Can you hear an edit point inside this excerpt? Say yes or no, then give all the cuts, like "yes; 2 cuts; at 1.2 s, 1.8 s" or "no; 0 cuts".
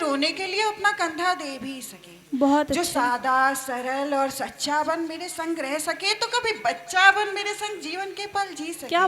no; 0 cuts